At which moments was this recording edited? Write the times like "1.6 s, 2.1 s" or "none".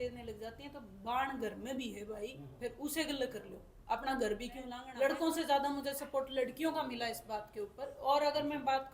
4.8 s